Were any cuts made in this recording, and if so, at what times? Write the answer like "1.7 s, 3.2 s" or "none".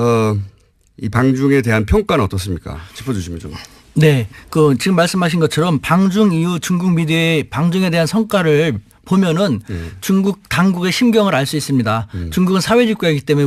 2.2 s